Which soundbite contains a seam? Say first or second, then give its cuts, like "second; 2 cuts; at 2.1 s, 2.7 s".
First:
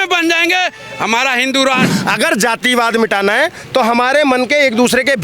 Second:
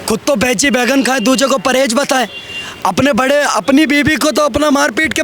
first; 1 cut; at 1.9 s